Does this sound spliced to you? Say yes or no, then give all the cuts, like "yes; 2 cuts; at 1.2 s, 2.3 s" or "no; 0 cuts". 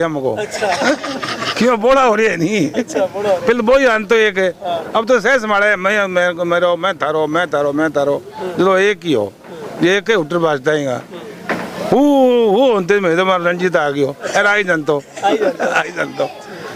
no; 0 cuts